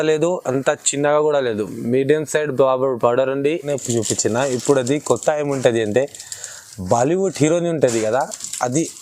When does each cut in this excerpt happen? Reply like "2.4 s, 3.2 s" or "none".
3.7 s